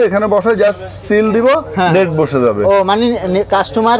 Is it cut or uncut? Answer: uncut